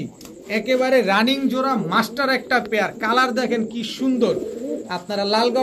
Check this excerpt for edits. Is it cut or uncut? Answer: uncut